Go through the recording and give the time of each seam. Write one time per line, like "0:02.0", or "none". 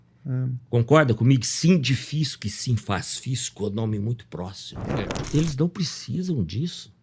0:05.0